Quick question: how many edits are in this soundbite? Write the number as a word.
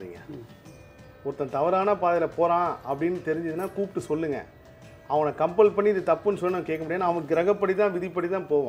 zero